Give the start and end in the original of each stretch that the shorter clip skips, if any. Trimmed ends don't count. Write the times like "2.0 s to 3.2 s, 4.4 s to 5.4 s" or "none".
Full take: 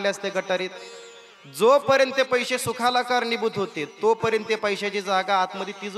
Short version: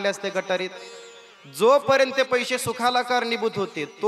none